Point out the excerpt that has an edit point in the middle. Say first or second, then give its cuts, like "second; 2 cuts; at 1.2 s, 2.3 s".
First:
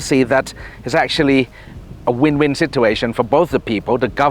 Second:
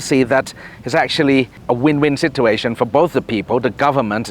second; 1 cut; at 1.6 s